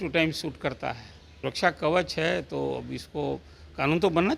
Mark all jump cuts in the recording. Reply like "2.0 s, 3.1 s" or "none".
1.2 s